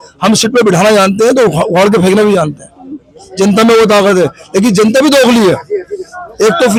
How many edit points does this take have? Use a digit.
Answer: 0